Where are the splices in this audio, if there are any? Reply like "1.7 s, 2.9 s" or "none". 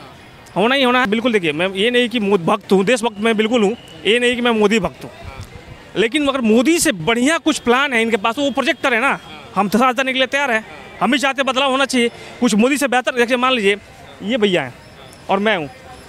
1.1 s